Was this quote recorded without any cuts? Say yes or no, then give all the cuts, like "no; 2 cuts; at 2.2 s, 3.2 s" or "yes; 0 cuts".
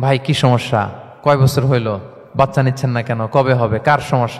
no; 2 cuts; at 1.0 s, 2.2 s